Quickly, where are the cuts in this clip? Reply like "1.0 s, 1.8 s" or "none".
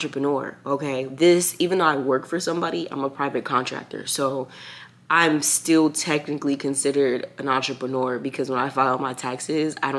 none